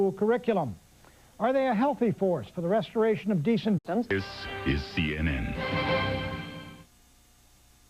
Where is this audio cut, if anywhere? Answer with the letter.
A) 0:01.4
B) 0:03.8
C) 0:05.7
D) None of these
D